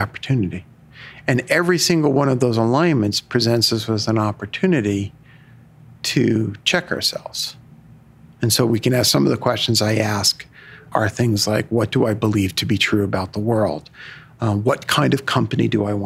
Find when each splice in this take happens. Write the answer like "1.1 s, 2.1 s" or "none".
3.2 s, 10.9 s

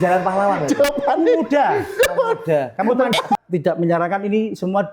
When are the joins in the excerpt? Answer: 3.1 s

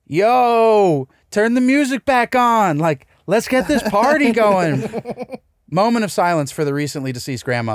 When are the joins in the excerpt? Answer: none

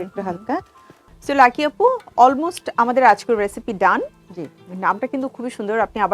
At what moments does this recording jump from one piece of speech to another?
1.1 s

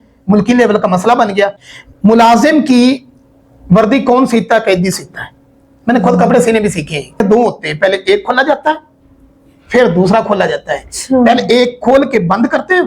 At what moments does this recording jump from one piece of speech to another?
1.6 s, 7.2 s

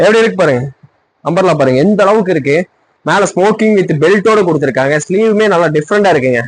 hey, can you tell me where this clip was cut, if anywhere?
none

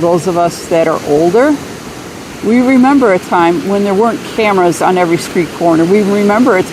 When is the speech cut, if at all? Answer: none

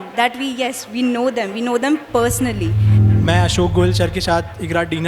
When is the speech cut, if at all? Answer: 3.0 s

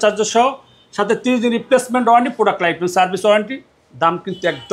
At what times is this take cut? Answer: none

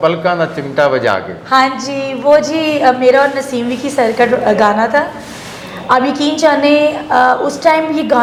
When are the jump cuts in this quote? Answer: none

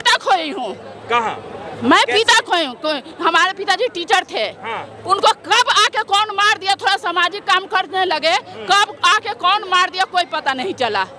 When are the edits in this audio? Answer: none

